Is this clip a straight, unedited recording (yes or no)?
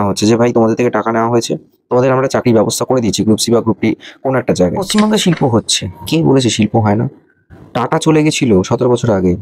no